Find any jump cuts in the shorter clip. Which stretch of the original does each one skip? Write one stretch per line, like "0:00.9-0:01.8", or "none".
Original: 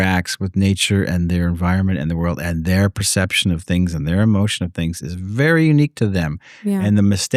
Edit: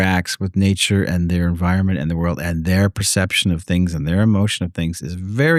none